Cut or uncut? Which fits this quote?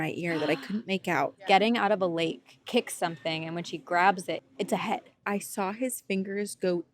cut